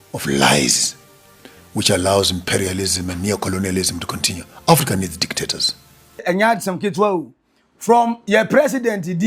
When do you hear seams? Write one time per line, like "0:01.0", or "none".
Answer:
0:06.2